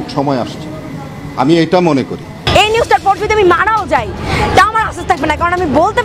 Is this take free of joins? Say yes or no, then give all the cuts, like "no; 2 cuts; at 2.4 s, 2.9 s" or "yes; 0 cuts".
no; 1 cut; at 2.5 s